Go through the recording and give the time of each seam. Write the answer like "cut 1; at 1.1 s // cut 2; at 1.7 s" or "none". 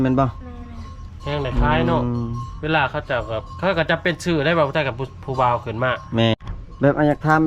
cut 1; at 6.3 s